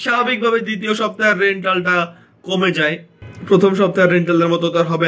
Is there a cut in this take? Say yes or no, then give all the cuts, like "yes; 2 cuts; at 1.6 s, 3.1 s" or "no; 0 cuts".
no; 0 cuts